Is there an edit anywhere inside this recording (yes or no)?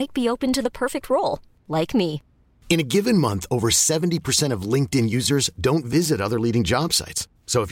no